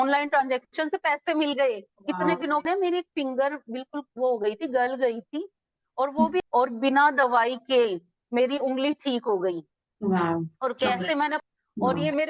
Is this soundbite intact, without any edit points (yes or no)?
no